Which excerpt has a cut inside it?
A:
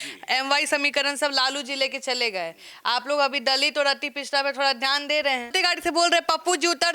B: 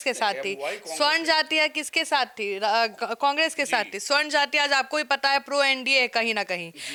A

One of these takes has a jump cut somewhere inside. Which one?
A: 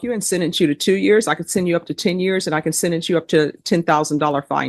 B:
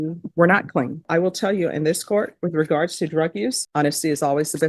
B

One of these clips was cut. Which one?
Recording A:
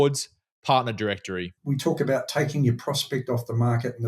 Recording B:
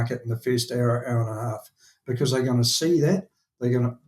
A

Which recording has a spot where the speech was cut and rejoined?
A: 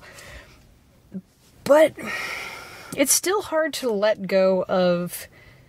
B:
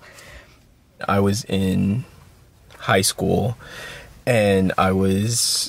B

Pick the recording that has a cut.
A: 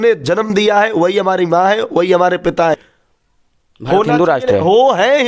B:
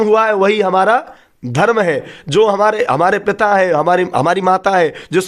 A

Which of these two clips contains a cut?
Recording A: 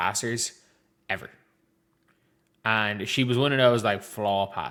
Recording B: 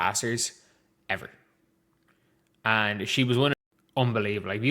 B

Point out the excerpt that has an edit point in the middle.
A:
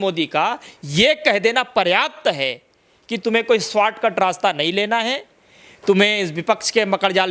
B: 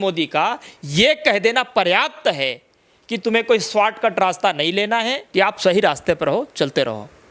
B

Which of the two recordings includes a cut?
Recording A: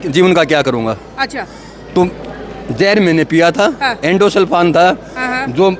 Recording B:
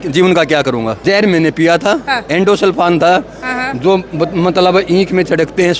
B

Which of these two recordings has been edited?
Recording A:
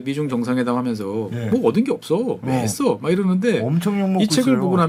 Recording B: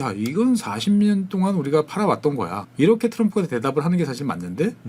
B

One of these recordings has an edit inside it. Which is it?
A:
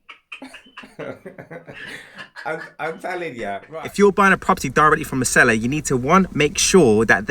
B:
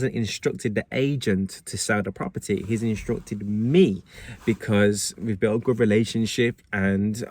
A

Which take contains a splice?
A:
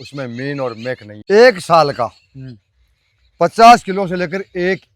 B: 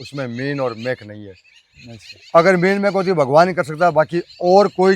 A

